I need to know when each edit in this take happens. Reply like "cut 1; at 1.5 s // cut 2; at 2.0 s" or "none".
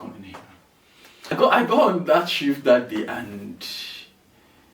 cut 1; at 1.3 s